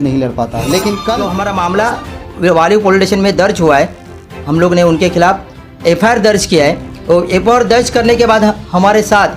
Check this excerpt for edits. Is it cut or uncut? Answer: cut